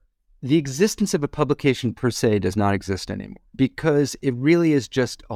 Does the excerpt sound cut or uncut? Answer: uncut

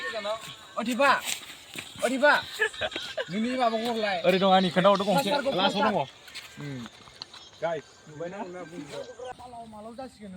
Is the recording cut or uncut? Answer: cut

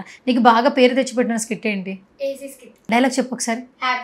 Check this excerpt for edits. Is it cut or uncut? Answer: cut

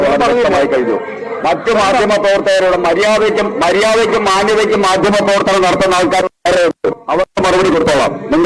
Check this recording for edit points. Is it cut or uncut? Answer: uncut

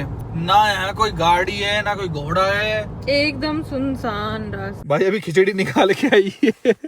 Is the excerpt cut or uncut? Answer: cut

